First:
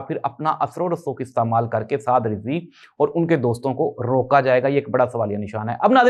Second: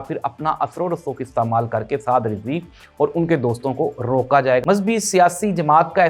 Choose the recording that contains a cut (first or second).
second